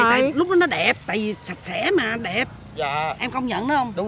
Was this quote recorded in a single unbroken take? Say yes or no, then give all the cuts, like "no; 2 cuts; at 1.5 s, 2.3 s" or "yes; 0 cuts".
yes; 0 cuts